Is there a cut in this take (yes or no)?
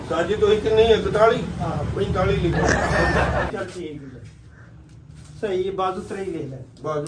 no